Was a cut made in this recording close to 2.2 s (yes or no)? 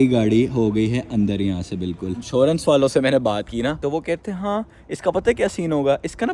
yes